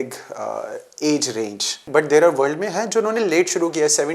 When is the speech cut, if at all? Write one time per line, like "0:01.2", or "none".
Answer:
0:01.8